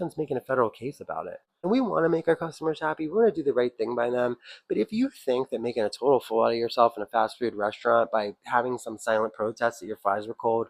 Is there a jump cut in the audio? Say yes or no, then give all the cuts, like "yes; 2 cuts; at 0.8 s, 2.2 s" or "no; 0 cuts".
yes; 1 cut; at 1.7 s